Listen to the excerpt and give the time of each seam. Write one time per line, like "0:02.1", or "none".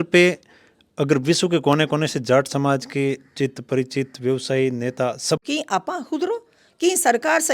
0:05.4